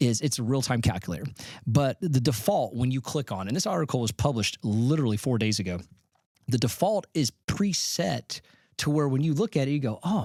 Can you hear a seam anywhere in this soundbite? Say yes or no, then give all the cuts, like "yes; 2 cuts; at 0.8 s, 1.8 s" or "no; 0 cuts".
no; 0 cuts